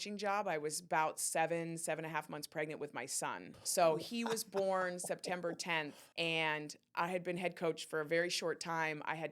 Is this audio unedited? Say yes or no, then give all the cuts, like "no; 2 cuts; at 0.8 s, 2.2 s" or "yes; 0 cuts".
no; 2 cuts; at 3.5 s, 6.0 s